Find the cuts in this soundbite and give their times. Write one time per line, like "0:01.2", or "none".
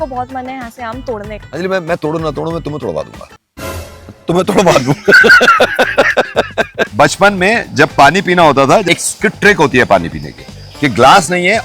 0:01.4
0:06.9
0:08.8